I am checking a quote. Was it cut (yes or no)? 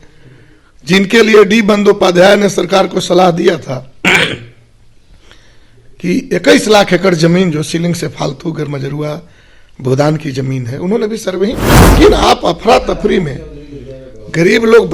yes